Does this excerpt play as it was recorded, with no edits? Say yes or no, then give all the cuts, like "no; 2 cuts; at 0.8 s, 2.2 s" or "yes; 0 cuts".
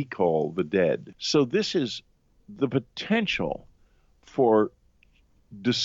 no; 1 cut; at 1.1 s